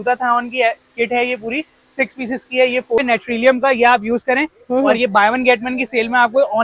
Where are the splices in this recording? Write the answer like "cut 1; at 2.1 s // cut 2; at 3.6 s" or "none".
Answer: cut 1; at 3.0 s